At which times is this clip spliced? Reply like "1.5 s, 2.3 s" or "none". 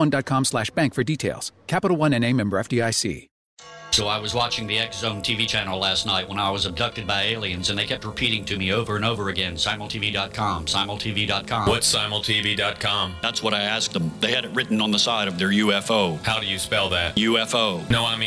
3.3 s

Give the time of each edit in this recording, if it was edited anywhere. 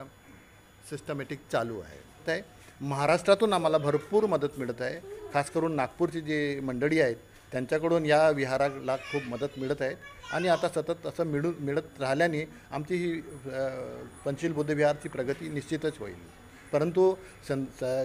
2.2 s

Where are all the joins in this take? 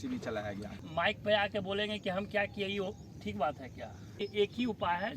0.8 s, 4.2 s

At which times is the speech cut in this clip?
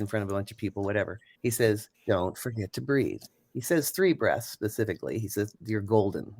1.2 s, 1.9 s, 3.3 s

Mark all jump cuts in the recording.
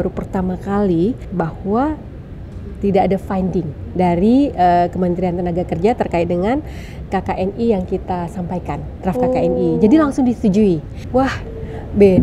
1.2 s, 10.9 s

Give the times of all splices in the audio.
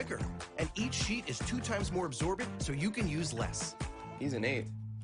2.5 s

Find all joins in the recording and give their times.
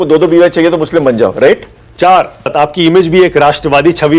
2.5 s

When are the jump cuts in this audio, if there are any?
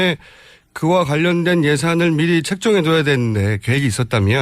3.0 s

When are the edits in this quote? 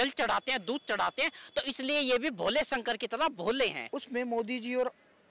3.8 s

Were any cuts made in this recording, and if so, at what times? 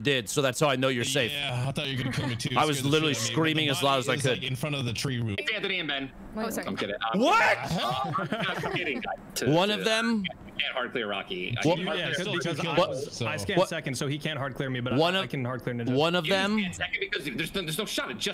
5.4 s, 9.2 s

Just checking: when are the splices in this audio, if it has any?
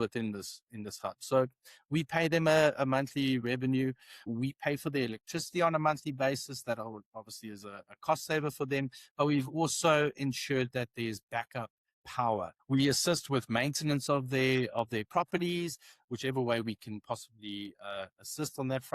4.3 s, 12.6 s

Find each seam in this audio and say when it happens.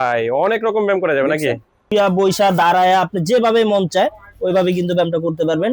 1.8 s

